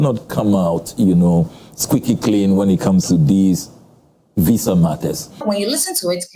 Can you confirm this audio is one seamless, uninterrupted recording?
no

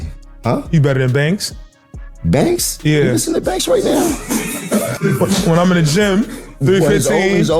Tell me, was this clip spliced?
yes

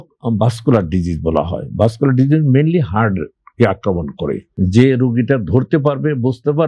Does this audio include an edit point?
yes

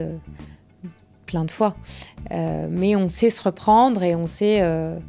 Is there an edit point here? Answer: no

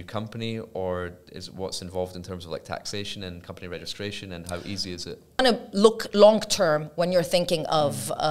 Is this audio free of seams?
no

